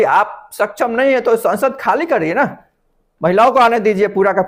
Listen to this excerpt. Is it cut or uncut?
uncut